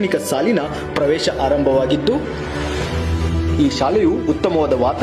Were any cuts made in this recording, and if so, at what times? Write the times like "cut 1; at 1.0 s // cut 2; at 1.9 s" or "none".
none